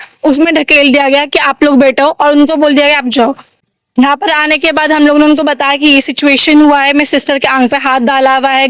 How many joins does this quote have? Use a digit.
1